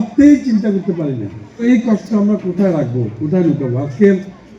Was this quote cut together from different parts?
yes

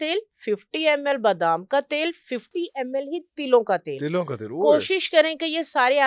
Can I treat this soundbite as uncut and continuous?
yes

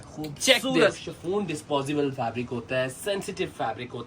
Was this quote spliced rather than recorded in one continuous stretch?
yes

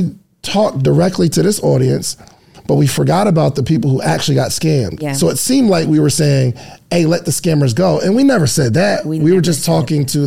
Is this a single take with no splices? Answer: yes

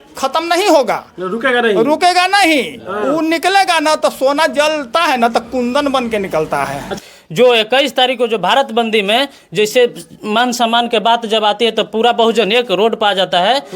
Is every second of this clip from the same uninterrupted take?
no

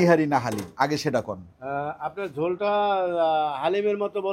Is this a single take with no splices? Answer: yes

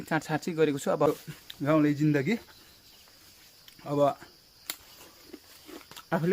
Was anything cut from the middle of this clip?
yes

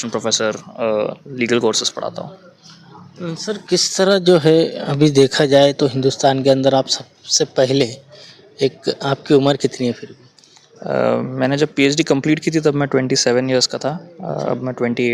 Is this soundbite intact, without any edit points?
yes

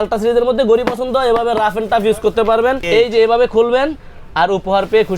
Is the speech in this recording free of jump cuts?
no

